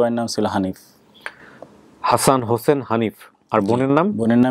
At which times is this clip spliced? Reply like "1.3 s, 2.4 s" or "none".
none